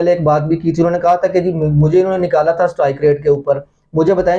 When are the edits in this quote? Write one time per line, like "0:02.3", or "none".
none